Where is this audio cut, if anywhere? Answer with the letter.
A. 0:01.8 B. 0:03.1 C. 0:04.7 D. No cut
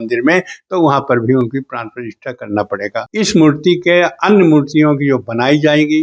B